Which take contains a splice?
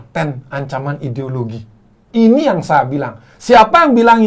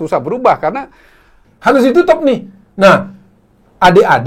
second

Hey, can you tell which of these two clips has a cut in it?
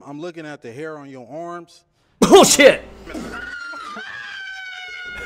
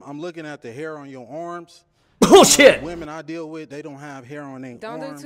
second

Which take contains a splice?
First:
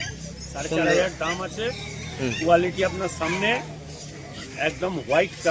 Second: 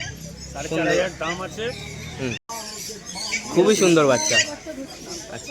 second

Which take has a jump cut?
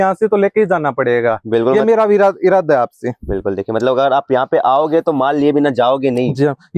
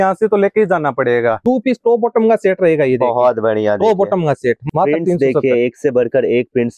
second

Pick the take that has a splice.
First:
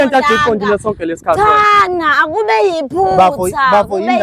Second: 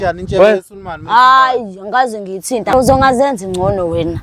second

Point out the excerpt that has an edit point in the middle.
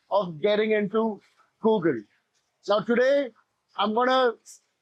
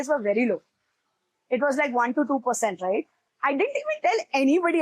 second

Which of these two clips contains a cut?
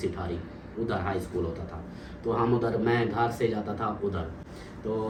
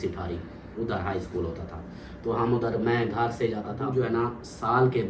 second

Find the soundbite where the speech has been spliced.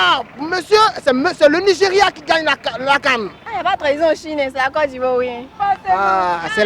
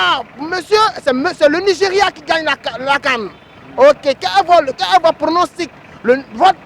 first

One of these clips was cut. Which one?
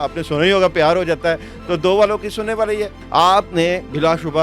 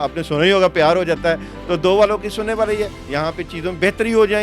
first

